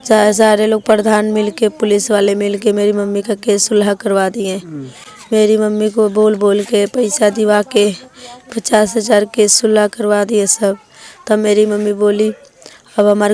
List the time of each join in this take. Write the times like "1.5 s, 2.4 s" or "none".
none